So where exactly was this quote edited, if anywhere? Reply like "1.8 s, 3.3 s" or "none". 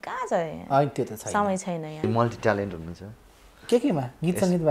2.1 s